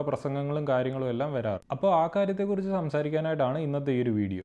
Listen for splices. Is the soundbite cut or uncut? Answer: uncut